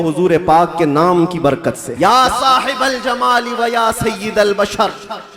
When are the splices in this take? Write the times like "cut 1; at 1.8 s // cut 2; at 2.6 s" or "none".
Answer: cut 1; at 1.9 s

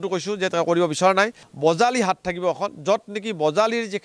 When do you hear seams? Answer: cut 1; at 1.4 s

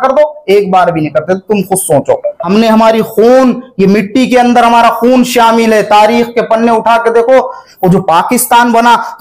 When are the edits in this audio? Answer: cut 1; at 2.4 s // cut 2; at 7.6 s

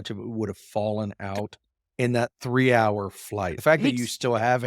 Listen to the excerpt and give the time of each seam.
cut 1; at 3.5 s

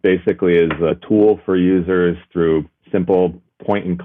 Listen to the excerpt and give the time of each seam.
cut 1; at 1.0 s

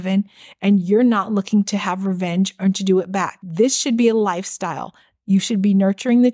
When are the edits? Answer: cut 1; at 3.4 s

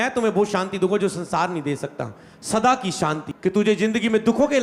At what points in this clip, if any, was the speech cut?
cut 1; at 3.3 s

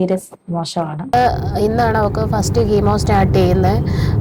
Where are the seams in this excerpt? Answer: cut 1; at 1.1 s

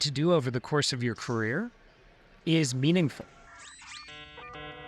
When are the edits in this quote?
cut 1; at 3.6 s

